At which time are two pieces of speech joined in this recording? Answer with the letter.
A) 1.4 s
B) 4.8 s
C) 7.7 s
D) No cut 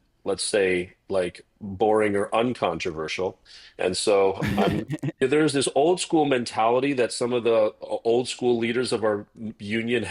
B